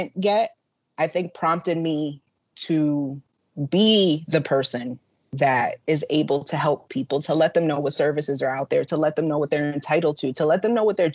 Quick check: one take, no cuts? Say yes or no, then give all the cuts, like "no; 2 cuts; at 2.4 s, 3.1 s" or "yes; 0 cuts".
yes; 0 cuts